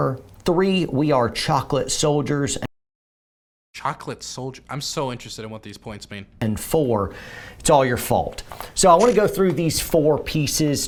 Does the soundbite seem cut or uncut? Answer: uncut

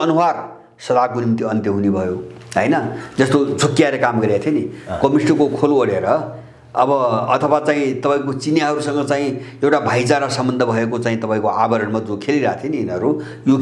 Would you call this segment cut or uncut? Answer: uncut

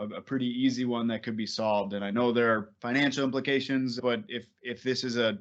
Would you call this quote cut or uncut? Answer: cut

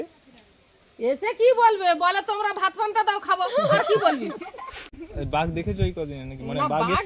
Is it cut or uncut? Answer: uncut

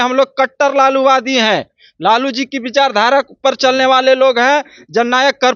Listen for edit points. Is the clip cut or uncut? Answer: uncut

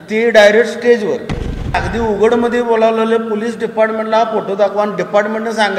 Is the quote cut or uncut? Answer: cut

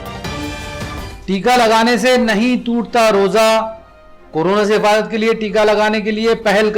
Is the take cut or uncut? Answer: cut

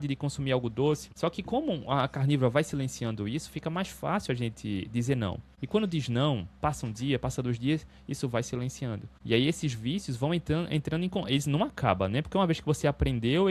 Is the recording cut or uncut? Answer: cut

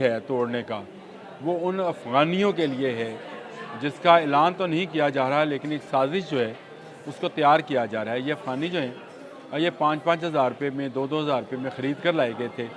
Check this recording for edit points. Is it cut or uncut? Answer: uncut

